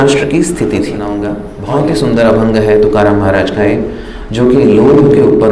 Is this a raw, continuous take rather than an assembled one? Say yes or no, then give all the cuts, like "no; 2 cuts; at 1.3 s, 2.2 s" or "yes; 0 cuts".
no; 1 cut; at 1.5 s